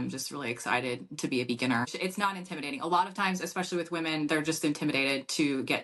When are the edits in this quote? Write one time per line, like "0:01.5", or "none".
0:01.9